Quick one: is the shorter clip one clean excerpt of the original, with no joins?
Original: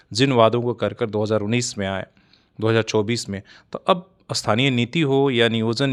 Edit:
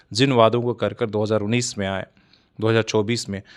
yes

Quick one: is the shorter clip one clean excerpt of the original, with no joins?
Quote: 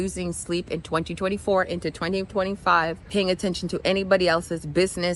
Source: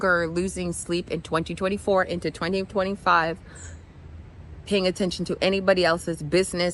no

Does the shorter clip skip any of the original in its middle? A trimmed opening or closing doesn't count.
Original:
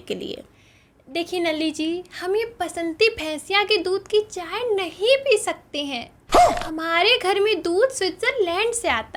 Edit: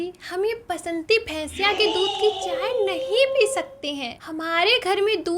yes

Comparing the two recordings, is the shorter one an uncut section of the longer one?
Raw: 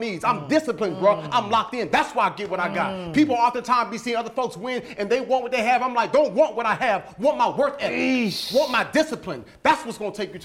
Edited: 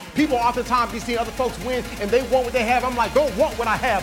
yes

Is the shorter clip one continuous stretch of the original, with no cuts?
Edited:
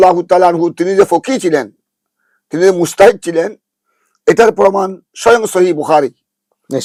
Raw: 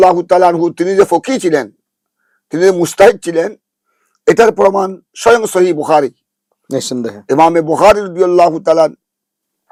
yes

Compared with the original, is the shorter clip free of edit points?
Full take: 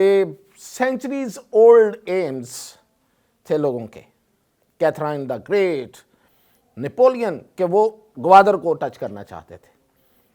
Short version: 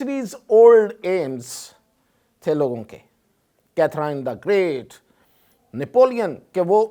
yes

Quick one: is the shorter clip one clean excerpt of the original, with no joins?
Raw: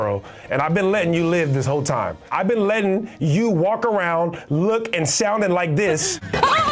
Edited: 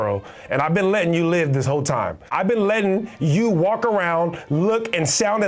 yes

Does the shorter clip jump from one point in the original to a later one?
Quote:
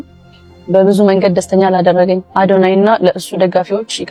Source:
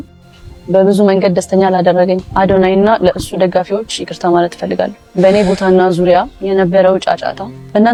no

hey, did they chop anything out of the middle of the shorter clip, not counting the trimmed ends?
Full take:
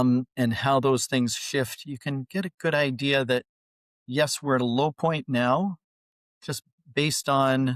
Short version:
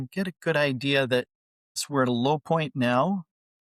yes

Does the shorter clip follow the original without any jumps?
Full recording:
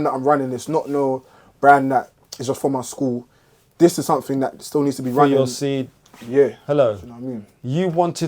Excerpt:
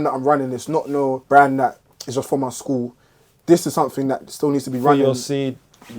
no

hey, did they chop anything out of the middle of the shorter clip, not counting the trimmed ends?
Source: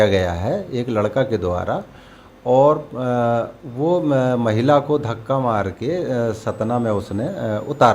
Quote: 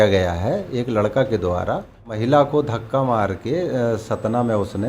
yes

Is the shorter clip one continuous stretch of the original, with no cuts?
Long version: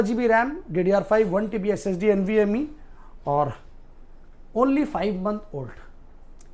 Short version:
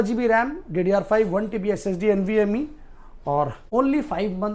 no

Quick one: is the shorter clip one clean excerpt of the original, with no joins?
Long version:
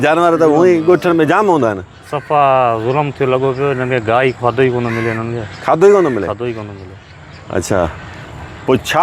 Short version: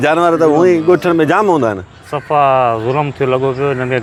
yes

